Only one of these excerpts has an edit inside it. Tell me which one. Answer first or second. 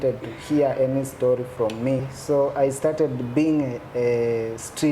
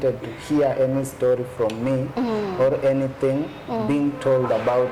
first